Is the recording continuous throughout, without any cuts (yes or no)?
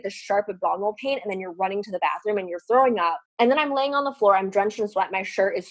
no